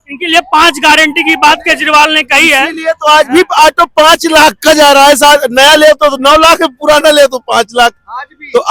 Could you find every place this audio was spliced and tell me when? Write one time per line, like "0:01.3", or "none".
none